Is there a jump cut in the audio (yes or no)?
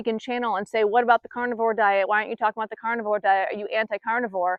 no